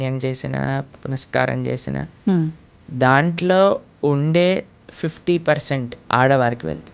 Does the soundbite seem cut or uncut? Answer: cut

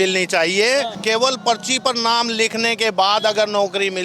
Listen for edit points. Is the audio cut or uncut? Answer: cut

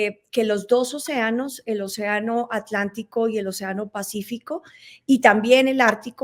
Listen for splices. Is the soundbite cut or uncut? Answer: uncut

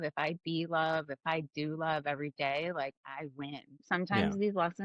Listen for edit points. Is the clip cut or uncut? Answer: cut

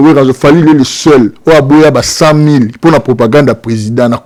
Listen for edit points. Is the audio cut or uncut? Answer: uncut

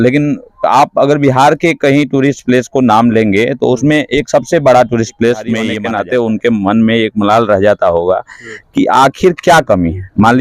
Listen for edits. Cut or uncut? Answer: cut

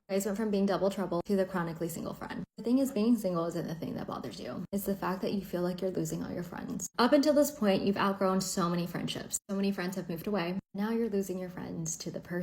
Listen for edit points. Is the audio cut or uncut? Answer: cut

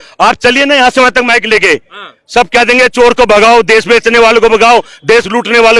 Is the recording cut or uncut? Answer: uncut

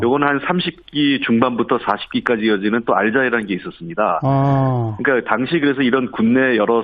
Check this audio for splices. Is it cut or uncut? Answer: uncut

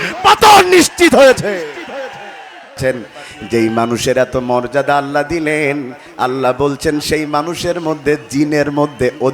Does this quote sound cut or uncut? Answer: cut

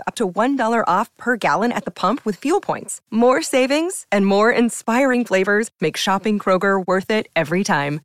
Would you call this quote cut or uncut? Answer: uncut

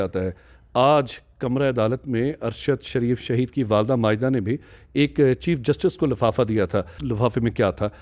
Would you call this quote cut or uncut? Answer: cut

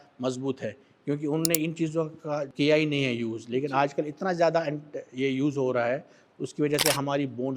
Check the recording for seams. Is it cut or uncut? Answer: cut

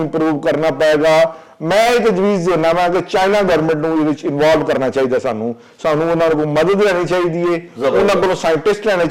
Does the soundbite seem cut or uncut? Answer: uncut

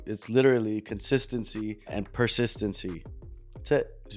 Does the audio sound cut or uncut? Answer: uncut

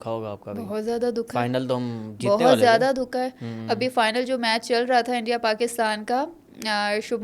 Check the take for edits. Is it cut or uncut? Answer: uncut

